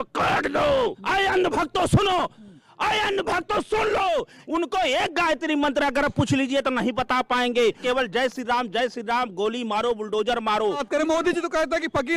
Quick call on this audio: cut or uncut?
cut